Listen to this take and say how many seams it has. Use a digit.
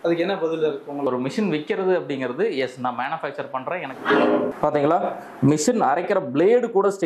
3